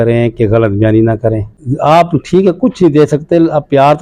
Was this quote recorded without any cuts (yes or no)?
no